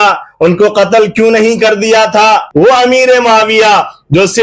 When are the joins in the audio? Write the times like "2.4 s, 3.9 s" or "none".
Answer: 2.5 s